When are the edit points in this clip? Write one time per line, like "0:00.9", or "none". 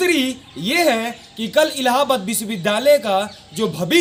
none

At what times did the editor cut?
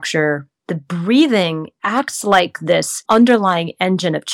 none

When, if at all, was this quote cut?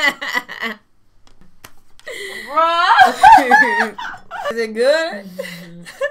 0:01.5
0:04.5

